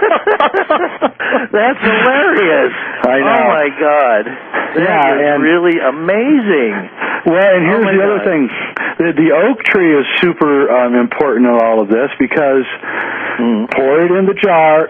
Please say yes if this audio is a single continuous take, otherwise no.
yes